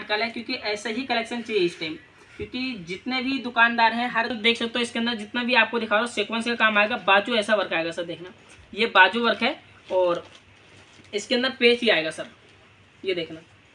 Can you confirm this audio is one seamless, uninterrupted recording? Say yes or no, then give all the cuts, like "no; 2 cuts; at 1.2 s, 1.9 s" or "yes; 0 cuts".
no; 1 cut; at 4.3 s